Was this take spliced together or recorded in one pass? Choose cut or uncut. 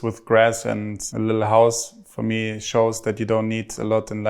cut